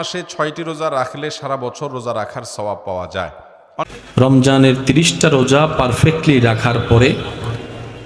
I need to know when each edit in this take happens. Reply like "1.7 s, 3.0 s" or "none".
3.9 s